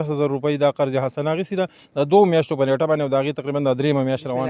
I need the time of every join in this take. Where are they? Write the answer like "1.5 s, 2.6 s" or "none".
none